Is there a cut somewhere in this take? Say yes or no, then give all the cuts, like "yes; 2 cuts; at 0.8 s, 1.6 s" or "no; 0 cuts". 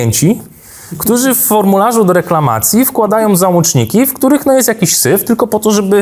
no; 0 cuts